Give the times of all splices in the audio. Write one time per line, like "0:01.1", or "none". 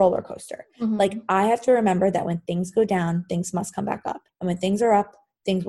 0:04.3